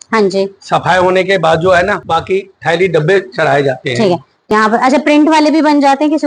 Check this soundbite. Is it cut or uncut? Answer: cut